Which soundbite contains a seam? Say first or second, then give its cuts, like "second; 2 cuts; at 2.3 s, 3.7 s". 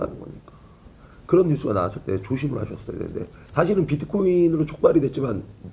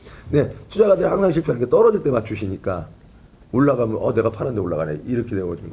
first; 1 cut; at 3.4 s